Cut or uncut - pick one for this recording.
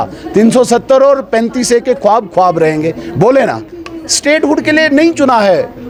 uncut